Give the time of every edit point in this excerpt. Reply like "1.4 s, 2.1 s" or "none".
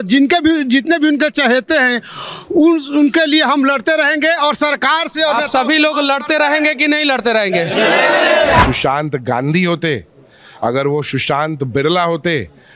8.6 s